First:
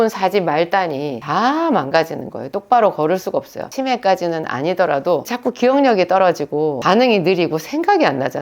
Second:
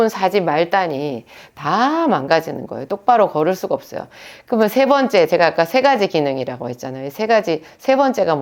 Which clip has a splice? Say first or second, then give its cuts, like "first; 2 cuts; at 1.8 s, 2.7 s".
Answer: first; 4 cuts; at 1.2 s, 3.6 s, 5.3 s, 6.8 s